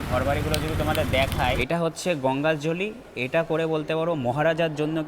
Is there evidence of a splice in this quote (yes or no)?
yes